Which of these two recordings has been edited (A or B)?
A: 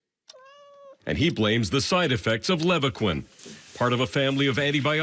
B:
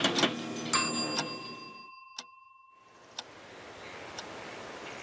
B